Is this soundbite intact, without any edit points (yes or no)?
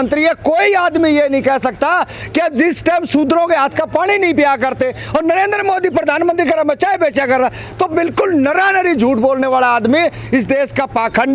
yes